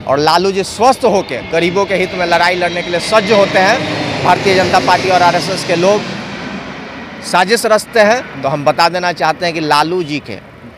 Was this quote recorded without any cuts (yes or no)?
yes